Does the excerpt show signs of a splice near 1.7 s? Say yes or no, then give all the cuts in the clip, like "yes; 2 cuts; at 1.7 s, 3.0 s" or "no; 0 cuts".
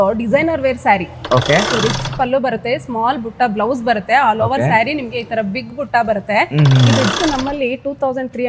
yes; 2 cuts; at 1.7 s, 7.1 s